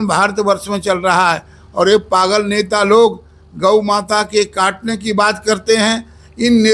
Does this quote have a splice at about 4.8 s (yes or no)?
no